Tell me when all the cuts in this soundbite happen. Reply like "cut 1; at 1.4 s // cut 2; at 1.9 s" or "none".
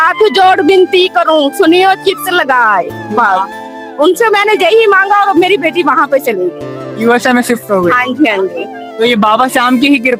none